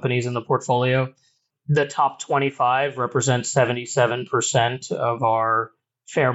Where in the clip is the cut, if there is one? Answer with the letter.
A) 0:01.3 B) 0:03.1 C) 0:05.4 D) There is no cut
D